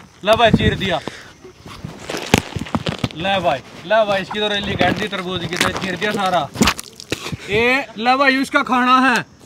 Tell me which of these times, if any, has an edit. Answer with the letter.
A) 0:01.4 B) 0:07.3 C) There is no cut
B